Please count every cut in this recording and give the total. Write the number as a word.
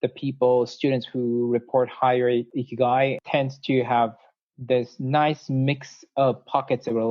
two